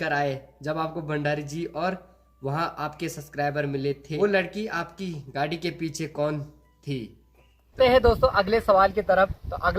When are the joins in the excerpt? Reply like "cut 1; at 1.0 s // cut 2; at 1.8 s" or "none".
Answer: cut 1; at 4.1 s // cut 2; at 7.8 s